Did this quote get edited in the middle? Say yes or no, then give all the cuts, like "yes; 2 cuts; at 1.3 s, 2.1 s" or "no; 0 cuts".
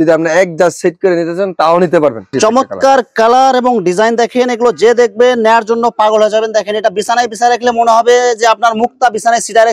yes; 1 cut; at 2.3 s